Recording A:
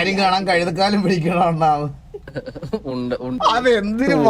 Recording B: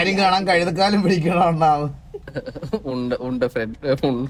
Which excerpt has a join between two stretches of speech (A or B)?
A